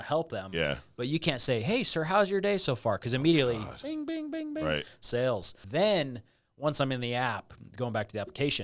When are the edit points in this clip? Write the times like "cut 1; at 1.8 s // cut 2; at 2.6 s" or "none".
cut 1; at 5.6 s

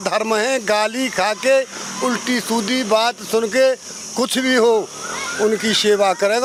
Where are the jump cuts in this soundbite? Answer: none

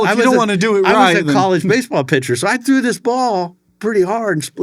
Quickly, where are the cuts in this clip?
cut 1; at 3.6 s

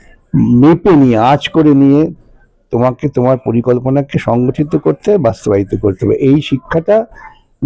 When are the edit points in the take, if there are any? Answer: none

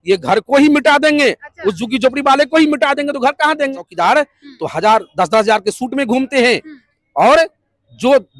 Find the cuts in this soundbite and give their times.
cut 1; at 3.9 s

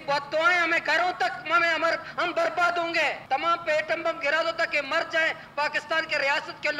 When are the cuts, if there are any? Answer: cut 1; at 3.2 s

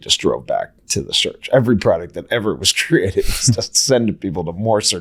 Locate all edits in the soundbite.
cut 1; at 3.5 s

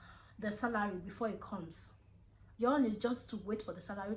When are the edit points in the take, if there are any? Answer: none

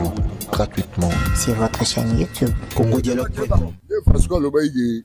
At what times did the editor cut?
none

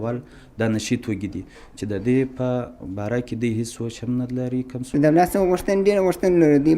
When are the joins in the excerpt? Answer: cut 1; at 4.8 s

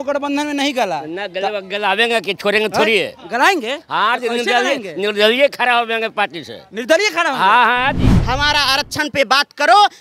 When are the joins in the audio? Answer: cut 1; at 8.1 s

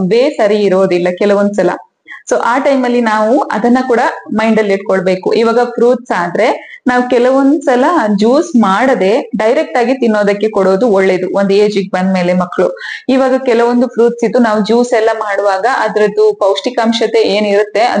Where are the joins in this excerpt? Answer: none

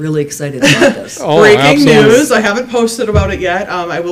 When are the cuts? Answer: none

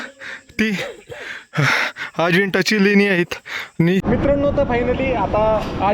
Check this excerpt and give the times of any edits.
cut 1; at 4.0 s

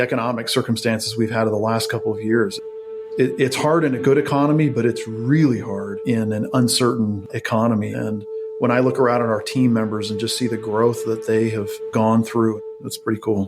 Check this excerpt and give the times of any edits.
cut 1; at 11.8 s // cut 2; at 12.6 s

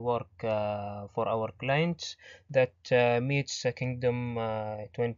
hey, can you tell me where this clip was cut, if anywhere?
cut 1; at 4.0 s

